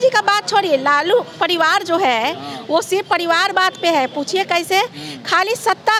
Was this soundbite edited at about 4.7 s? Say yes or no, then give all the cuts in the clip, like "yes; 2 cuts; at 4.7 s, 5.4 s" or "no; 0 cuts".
no; 0 cuts